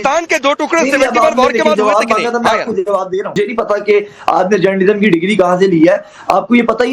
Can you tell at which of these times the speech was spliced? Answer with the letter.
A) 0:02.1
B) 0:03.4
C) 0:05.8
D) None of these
B